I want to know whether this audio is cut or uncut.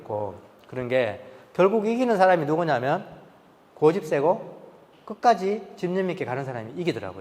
uncut